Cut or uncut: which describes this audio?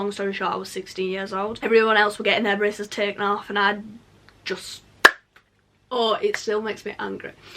uncut